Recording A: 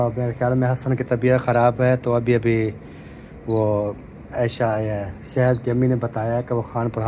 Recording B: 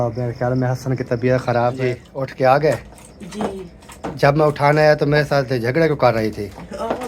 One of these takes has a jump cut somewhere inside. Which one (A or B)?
B